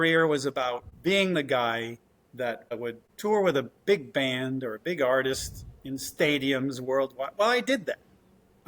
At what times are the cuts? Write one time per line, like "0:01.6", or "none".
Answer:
0:00.9
0:02.7